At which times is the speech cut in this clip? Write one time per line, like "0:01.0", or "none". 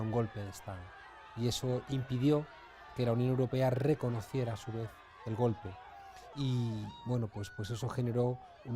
0:05.6